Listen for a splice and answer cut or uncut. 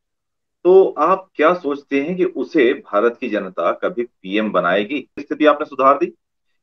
cut